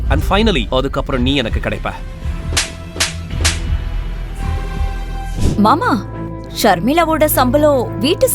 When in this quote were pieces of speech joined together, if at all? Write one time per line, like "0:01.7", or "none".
0:05.4